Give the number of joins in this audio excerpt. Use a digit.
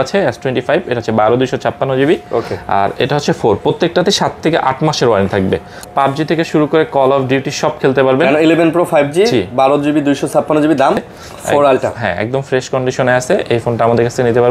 2